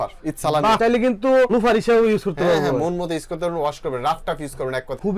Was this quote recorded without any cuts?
yes; 0 cuts

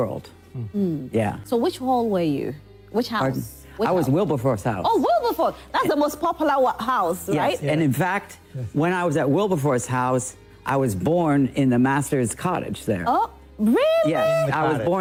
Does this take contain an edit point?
no; 0 cuts

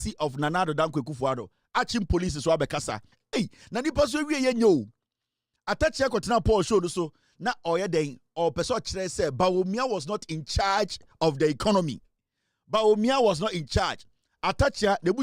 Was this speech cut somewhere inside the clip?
yes; 1 cut; at 3.1 s

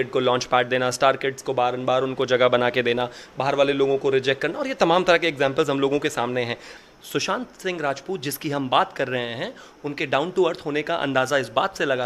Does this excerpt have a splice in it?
yes; 1 cut; at 6.7 s

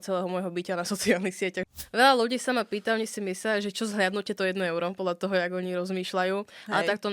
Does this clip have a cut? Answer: yes; 1 cut; at 1.7 s

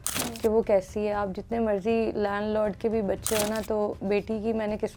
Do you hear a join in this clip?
no; 0 cuts

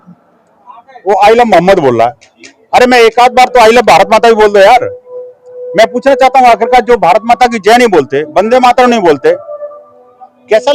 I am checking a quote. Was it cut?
no; 0 cuts

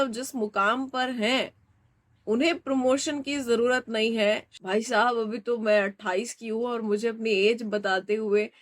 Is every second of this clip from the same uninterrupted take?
no; 1 cut; at 4.5 s

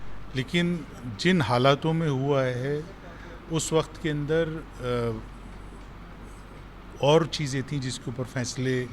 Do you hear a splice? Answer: no; 0 cuts

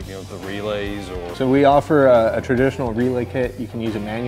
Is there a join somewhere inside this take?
yes; 1 cut; at 1.2 s

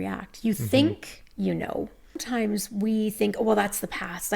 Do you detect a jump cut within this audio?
yes; 1 cut; at 2.2 s

